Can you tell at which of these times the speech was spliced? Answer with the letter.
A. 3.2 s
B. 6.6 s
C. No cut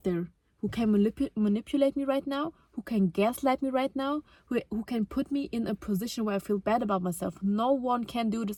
C